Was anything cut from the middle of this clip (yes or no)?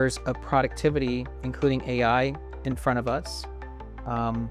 no